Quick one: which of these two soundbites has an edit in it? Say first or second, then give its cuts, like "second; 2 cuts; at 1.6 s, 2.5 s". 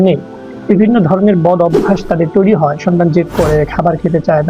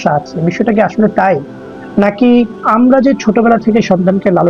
second; 1 cut; at 2.6 s